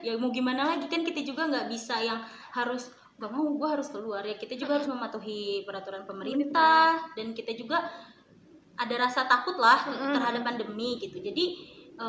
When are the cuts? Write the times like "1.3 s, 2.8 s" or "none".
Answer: none